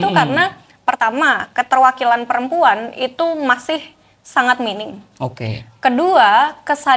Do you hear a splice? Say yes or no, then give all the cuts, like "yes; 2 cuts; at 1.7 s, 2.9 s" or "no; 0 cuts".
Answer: no; 0 cuts